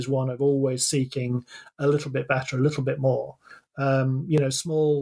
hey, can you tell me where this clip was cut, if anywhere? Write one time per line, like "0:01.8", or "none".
0:03.5